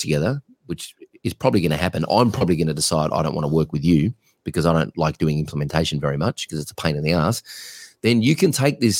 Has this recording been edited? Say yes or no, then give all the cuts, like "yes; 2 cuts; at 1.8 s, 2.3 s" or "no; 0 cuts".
no; 0 cuts